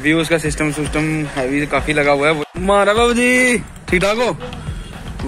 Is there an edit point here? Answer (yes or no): yes